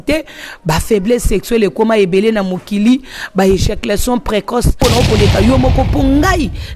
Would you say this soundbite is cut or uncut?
cut